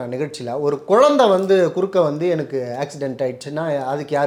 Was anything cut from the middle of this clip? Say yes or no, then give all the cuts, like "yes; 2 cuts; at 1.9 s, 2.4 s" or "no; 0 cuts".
no; 0 cuts